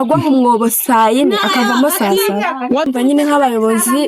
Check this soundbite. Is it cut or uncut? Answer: cut